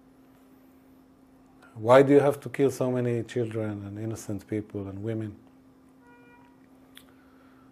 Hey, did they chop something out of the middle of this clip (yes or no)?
no